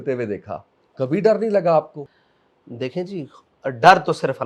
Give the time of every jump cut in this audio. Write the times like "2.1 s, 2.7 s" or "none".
2.0 s